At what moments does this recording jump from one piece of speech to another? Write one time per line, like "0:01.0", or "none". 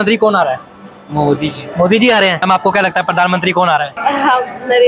0:02.4
0:03.9